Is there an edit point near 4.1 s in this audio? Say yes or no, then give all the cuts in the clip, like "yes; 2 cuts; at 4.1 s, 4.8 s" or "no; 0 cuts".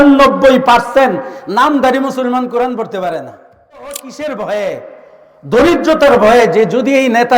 yes; 1 cut; at 4.1 s